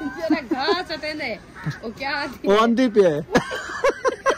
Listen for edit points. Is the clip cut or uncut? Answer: uncut